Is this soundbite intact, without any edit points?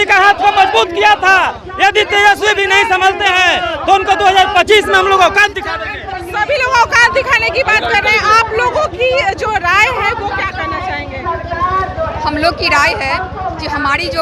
yes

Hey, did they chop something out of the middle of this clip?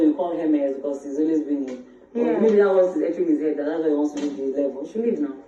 no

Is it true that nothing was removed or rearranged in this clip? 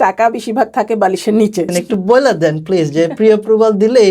no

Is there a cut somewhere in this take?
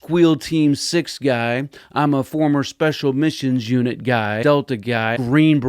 yes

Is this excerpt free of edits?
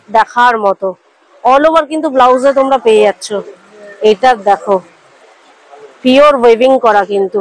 yes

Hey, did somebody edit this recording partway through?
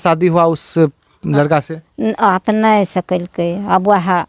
no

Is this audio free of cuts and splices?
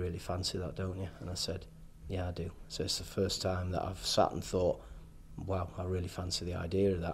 yes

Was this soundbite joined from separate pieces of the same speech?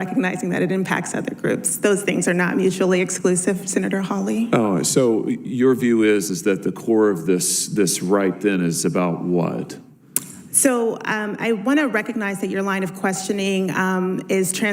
yes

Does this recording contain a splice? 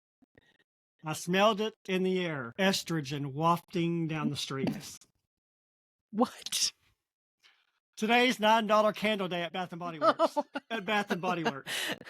yes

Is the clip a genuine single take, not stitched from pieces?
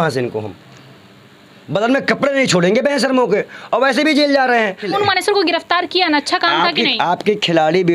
no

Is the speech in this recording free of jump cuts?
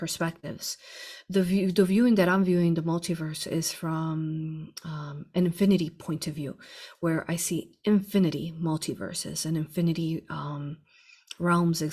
yes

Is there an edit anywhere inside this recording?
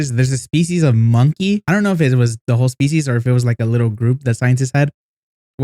yes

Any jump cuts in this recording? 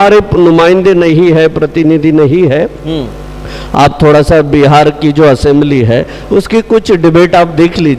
no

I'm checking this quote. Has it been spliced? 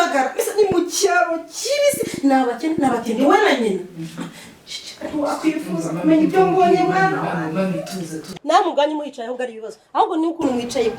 yes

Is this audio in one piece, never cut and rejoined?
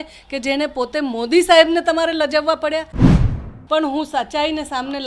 no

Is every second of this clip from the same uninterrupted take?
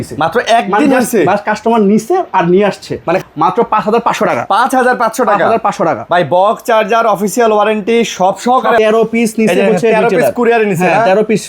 no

